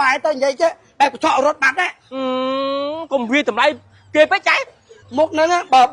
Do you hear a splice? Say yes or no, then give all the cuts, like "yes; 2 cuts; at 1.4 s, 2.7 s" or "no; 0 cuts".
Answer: yes; 1 cut; at 4.9 s